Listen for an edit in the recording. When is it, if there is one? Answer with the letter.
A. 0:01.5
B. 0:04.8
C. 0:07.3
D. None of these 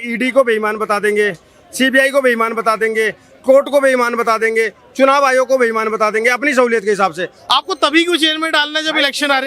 C